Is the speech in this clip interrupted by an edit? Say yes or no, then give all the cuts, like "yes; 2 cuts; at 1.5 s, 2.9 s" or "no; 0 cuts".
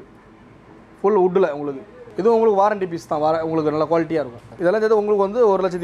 yes; 1 cut; at 4.5 s